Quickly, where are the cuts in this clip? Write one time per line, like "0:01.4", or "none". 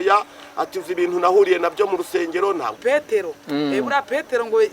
0:02.8